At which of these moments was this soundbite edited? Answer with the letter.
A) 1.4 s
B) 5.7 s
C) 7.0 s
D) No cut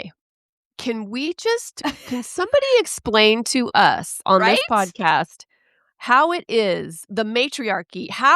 C